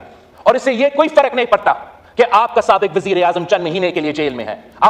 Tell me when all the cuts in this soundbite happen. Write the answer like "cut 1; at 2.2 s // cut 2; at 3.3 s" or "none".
none